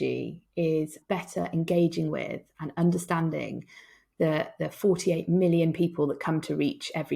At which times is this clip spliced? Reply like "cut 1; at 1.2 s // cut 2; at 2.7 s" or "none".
cut 1; at 1.0 s